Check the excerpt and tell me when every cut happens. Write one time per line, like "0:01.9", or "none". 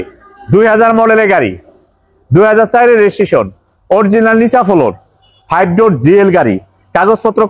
none